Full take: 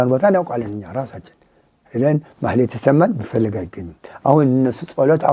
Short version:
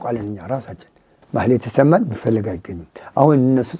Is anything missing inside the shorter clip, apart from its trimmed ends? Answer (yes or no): yes